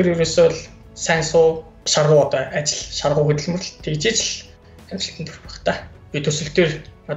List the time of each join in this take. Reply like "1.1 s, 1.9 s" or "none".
1.7 s, 5.9 s